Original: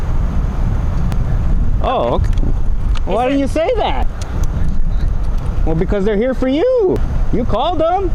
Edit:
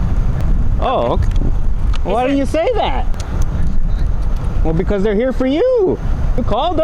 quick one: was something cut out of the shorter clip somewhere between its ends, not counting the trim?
no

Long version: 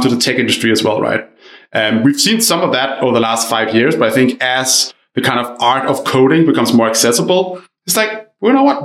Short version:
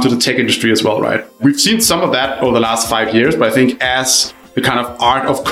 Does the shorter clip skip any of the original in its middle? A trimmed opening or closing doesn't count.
yes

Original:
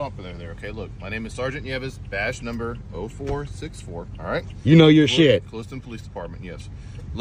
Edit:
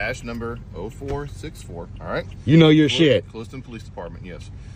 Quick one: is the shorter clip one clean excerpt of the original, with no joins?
yes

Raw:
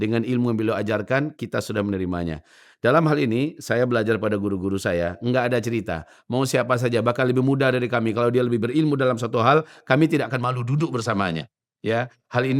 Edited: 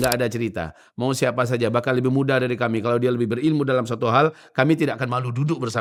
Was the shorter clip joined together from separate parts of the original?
no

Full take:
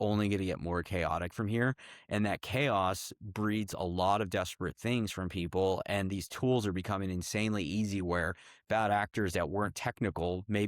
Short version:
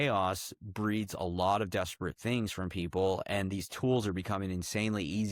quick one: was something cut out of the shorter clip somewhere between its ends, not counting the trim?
no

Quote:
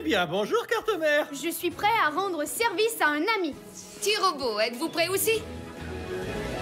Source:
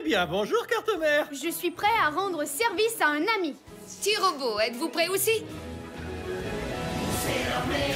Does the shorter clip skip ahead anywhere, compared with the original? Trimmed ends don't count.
yes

